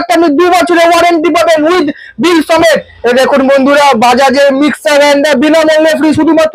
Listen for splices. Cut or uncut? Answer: uncut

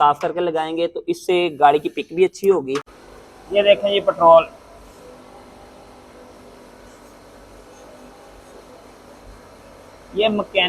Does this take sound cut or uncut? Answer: cut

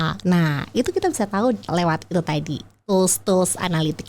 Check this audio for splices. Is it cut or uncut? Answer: cut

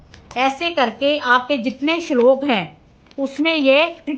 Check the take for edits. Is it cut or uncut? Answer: uncut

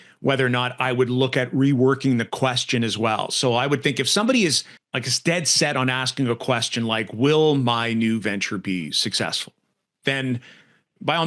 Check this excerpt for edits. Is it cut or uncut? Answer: uncut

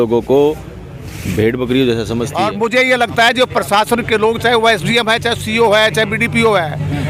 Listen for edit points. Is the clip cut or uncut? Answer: cut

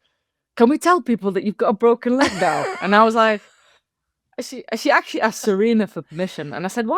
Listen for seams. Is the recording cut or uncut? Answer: uncut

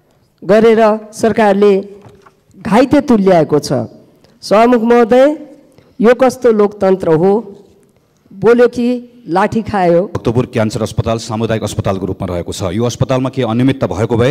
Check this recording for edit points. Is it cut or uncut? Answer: cut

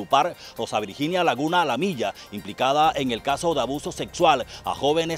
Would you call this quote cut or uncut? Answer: uncut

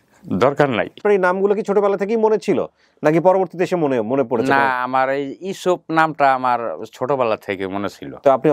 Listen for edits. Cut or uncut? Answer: cut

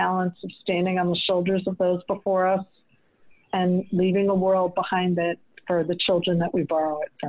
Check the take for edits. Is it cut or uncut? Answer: uncut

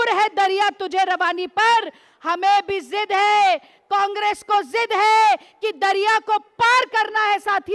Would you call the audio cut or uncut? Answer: uncut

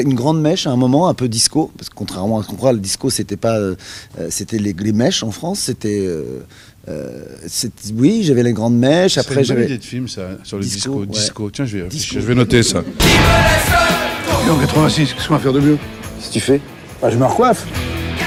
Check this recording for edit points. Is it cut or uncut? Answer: uncut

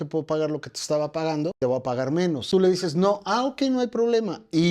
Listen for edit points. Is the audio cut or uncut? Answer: cut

